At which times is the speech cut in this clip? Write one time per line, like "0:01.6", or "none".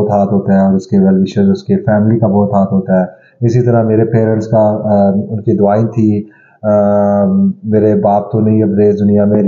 none